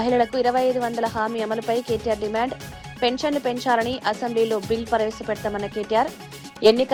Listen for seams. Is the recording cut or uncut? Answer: uncut